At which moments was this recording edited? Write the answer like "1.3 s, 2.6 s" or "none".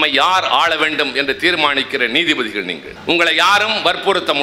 2.9 s